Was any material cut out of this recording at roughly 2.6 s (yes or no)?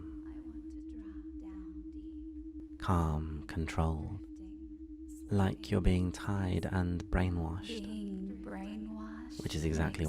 yes